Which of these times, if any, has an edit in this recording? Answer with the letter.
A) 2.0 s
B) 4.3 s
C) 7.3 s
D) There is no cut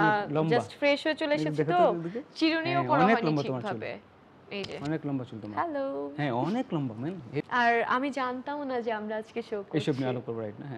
C